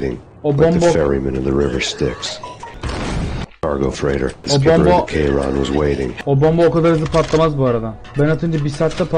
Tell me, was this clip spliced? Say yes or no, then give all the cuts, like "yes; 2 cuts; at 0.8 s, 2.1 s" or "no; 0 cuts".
yes; 4 cuts; at 2.6 s, 4.4 s, 6.2 s, 8.0 s